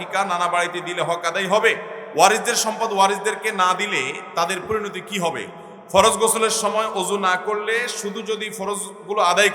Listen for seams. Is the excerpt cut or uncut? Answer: cut